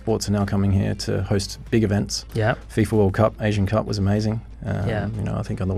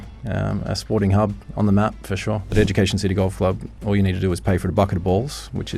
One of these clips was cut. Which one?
second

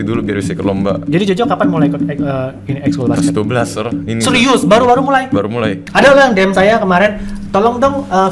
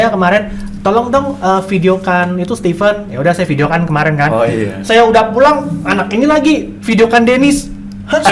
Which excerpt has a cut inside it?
first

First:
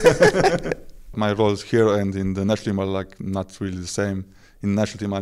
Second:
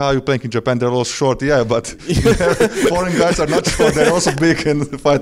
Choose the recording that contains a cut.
first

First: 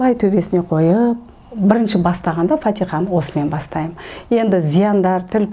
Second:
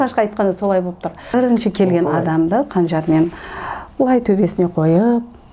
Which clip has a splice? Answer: second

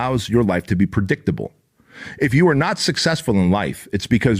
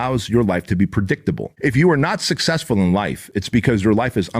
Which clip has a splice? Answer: second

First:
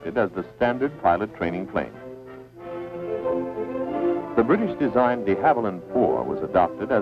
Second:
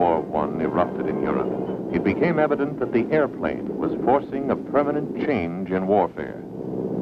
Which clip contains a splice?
second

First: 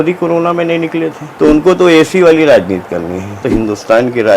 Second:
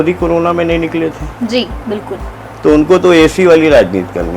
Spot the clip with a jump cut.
first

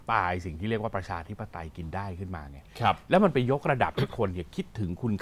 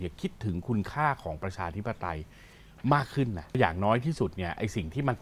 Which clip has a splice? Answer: second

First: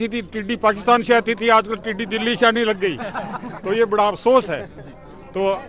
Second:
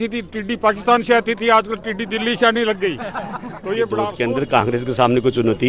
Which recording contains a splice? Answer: second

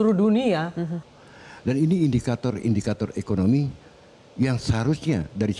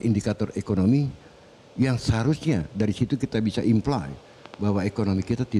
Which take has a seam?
first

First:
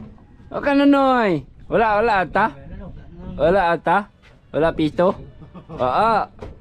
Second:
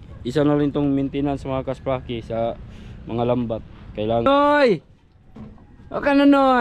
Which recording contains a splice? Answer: second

